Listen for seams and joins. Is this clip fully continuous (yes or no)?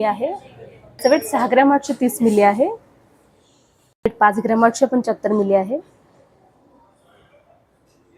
yes